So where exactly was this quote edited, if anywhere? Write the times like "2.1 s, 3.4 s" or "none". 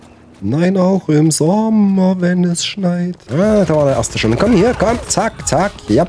3.2 s